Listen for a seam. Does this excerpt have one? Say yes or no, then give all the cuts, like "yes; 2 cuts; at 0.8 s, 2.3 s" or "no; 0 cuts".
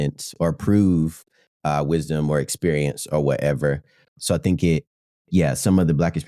yes; 1 cut; at 4.1 s